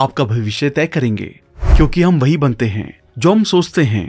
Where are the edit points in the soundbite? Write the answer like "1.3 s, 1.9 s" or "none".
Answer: none